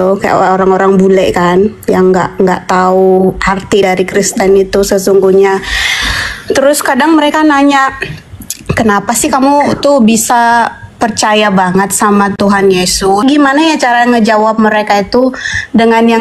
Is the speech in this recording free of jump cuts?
no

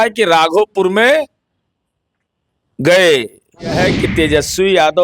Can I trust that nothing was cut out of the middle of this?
no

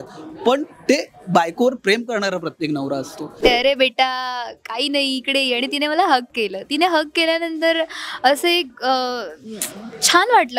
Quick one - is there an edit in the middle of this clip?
yes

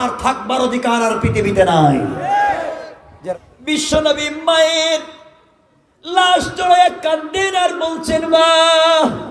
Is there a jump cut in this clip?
yes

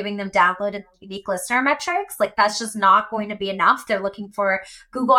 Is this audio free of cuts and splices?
yes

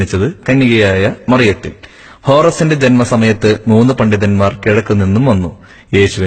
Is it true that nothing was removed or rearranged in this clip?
no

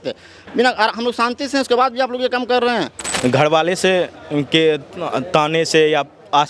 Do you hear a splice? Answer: yes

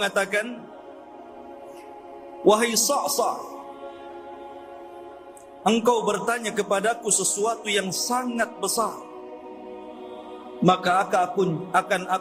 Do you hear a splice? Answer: no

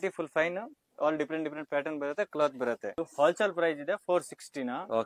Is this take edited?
no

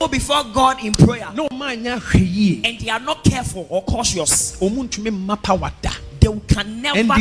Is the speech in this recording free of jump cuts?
yes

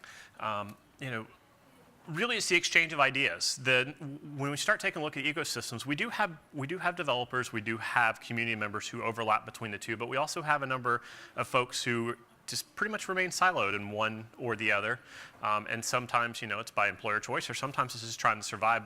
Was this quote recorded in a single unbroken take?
no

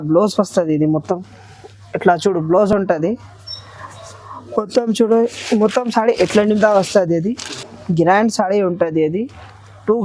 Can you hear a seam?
no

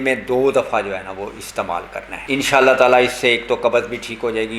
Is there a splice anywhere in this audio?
yes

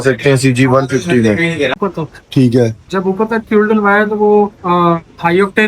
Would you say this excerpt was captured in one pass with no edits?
no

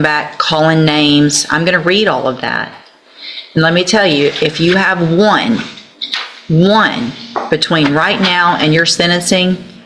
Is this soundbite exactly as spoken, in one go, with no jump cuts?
yes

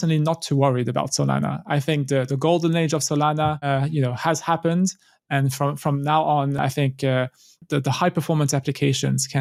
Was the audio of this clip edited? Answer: no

